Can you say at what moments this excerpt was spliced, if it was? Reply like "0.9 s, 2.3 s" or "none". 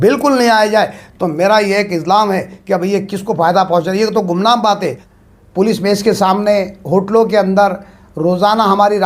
5.0 s